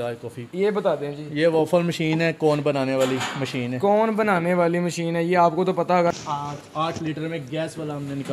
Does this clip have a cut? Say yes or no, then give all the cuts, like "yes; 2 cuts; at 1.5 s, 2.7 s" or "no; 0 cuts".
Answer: yes; 1 cut; at 6.1 s